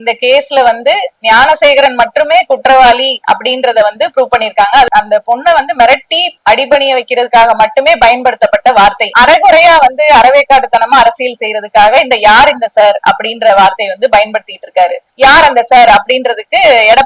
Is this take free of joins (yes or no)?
no